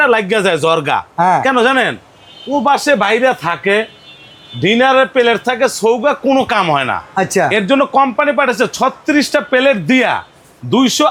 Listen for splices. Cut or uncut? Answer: uncut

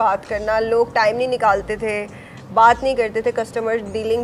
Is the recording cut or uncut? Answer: uncut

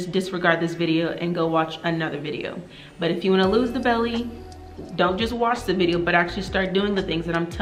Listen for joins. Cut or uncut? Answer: uncut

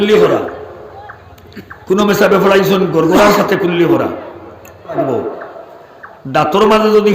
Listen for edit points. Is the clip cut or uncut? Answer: cut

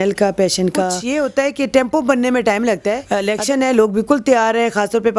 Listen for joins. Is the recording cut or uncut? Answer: cut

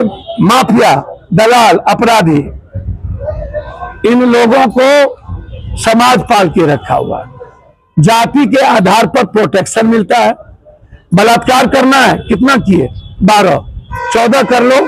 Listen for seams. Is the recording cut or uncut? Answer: uncut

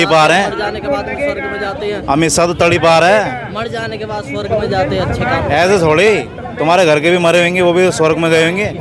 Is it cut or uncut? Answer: uncut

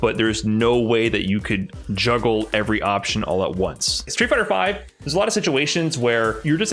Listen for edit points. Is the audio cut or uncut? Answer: cut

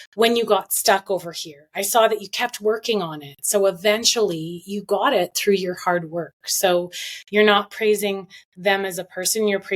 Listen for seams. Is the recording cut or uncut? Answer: uncut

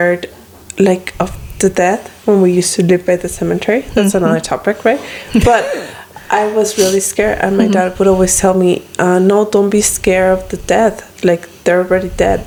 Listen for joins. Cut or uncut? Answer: uncut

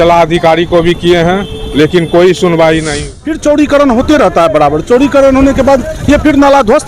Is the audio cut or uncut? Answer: cut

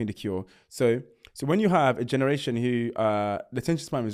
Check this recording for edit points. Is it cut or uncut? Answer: uncut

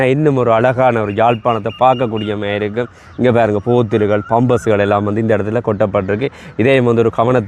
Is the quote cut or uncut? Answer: uncut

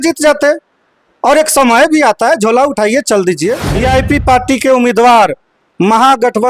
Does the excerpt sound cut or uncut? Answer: cut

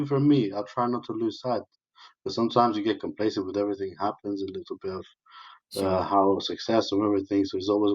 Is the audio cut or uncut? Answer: uncut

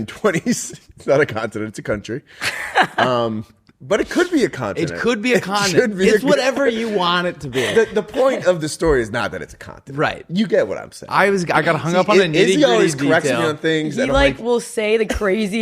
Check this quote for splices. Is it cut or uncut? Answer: uncut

